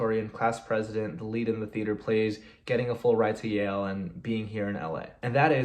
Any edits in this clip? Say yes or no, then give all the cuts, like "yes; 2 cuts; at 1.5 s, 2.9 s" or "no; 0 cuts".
no; 0 cuts